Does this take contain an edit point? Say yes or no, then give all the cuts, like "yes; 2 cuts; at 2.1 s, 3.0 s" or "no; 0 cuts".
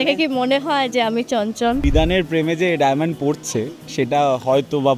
yes; 1 cut; at 1.8 s